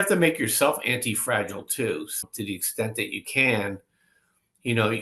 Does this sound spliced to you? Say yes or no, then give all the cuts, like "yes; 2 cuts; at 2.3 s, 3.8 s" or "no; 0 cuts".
yes; 1 cut; at 2.2 s